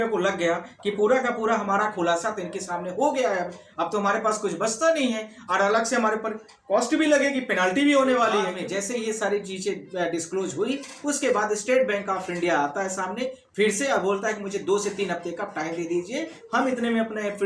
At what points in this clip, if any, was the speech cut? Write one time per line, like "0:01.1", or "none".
0:08.6